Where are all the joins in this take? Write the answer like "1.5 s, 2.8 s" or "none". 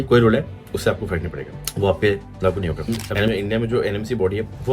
3.1 s